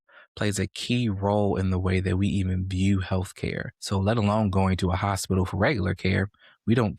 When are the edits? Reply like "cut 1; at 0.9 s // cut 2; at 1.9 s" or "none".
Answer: cut 1; at 3.7 s